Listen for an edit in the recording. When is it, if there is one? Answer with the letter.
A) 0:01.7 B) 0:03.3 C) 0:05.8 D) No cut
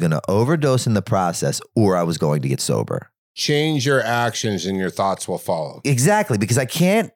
B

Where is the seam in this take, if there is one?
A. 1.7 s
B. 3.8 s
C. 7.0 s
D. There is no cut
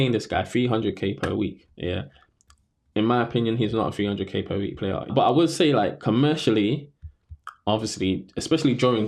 D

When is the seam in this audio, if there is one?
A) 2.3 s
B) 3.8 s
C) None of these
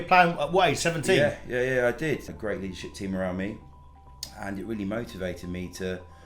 A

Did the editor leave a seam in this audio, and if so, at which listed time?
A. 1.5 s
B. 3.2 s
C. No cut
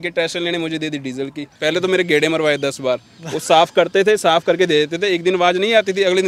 A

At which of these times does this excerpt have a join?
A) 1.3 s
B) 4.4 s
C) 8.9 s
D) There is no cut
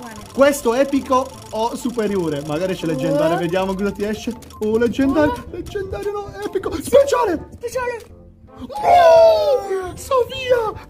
D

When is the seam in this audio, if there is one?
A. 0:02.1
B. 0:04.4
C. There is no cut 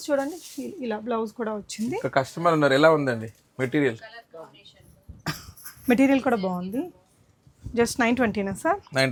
C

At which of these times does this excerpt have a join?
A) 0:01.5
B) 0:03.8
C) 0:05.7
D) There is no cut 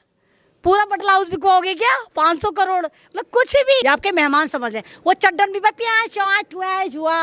B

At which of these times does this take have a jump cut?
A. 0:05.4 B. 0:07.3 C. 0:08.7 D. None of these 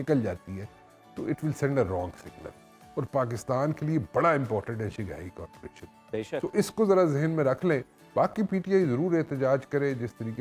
D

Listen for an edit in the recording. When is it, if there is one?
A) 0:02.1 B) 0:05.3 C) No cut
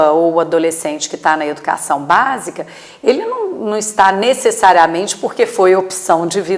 C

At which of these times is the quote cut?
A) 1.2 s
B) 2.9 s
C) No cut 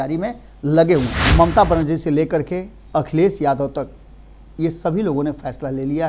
A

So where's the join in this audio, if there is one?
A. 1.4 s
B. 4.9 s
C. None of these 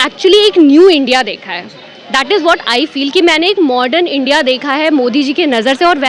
C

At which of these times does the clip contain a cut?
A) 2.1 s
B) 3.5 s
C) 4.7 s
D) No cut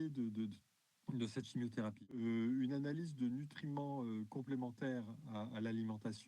A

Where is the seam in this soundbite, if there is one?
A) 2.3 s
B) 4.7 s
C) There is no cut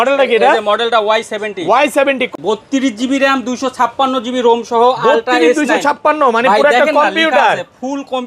A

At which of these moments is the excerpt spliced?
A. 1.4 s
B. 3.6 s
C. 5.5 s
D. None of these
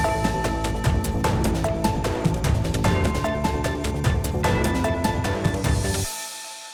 D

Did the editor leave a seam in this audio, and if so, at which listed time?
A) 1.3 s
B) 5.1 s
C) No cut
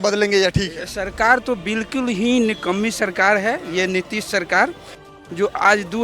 B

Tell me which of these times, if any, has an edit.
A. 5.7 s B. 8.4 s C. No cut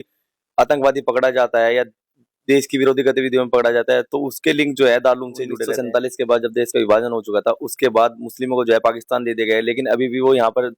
A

